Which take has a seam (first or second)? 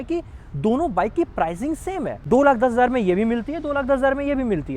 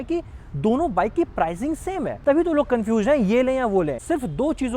second